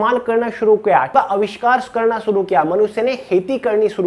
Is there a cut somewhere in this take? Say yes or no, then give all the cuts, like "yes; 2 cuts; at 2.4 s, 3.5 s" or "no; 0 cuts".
yes; 1 cut; at 1.1 s